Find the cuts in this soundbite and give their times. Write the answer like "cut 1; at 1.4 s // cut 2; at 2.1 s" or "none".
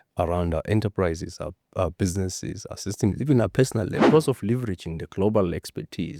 cut 1; at 4.1 s